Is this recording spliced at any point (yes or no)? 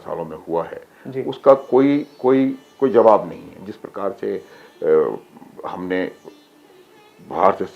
no